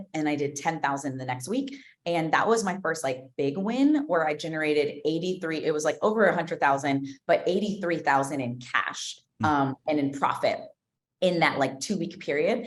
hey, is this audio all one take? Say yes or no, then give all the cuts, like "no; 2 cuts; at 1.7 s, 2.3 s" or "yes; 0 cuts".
yes; 0 cuts